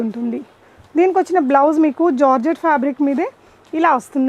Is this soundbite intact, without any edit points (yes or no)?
yes